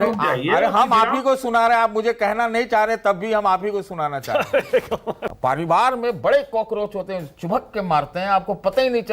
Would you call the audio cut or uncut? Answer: cut